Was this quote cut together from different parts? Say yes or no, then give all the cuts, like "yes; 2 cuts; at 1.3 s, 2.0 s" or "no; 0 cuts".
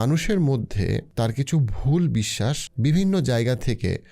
yes; 2 cuts; at 1.1 s, 2.7 s